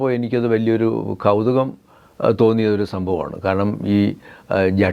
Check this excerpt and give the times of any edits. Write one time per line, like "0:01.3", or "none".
none